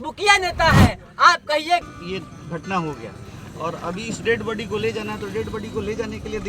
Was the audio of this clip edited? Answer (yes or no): yes